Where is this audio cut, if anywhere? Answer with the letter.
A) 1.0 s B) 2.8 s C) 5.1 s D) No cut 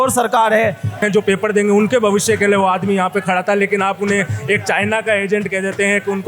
A